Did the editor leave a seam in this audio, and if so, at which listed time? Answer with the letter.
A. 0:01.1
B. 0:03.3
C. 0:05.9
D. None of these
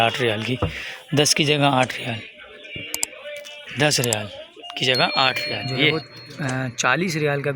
C